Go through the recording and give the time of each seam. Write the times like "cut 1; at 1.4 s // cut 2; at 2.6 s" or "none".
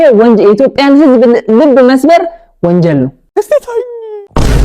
cut 1; at 3.2 s

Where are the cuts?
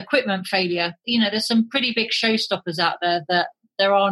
cut 1; at 1.0 s

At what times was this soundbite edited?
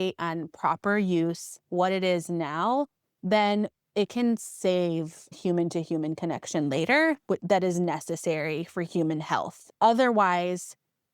cut 1; at 3.8 s // cut 2; at 5.3 s // cut 3; at 9.7 s

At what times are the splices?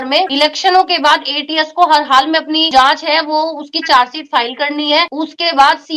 none

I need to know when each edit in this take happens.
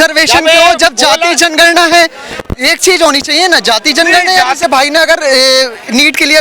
cut 1; at 4.6 s

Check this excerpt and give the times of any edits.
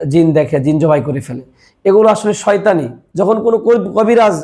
cut 1; at 3.0 s

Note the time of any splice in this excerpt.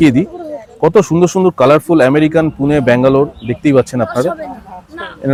none

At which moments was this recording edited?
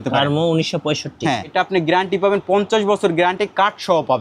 cut 1; at 1.5 s

